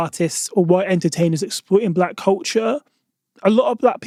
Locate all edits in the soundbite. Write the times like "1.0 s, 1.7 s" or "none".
none